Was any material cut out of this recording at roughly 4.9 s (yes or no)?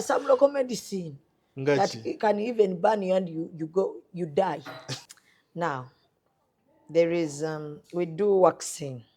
yes